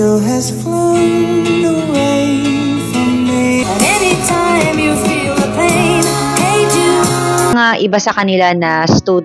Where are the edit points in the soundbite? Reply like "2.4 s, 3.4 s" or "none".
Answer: 3.7 s, 7.5 s